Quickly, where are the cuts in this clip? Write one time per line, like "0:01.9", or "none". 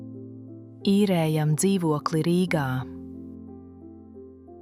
0:00.8
0:02.8